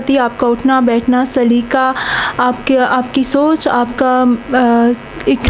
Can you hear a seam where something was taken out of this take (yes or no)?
no